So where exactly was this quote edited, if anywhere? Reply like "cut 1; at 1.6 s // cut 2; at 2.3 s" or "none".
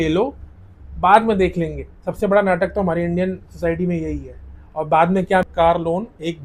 cut 1; at 5.4 s